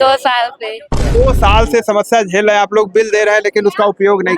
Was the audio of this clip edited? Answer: yes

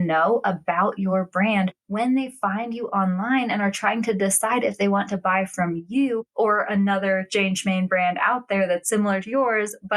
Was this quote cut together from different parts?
no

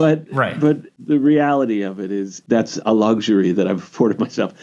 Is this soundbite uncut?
no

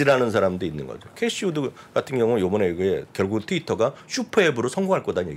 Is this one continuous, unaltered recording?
no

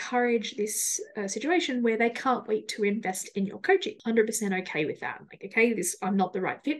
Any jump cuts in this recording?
yes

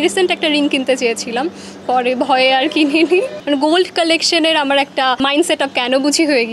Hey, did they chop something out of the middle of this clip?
yes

